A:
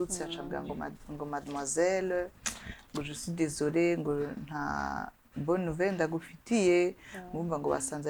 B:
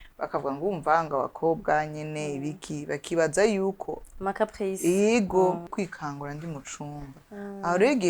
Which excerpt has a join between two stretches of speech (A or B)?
B